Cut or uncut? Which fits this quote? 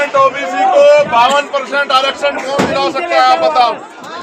uncut